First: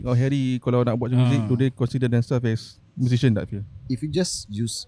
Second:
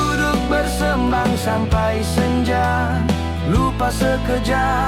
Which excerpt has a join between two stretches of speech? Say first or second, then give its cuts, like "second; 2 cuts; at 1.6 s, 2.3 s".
first; 1 cut; at 3.9 s